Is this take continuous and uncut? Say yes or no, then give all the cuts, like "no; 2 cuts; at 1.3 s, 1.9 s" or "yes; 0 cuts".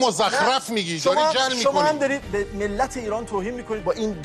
yes; 0 cuts